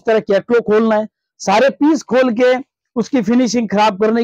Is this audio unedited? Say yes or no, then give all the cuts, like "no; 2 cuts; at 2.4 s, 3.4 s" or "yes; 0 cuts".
yes; 0 cuts